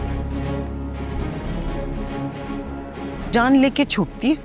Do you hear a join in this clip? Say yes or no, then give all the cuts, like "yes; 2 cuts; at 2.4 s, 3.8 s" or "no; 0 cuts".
yes; 1 cut; at 3.3 s